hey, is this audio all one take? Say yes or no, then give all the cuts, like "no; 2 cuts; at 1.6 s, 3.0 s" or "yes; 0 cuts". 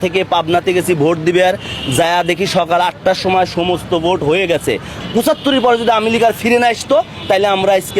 no; 1 cut; at 5.0 s